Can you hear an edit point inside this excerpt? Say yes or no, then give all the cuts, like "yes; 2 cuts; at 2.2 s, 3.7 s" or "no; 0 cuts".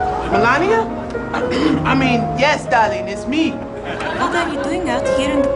no; 0 cuts